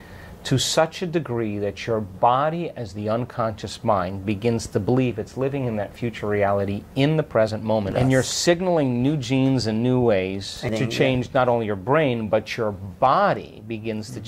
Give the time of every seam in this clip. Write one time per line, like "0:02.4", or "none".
0:07.9
0:10.6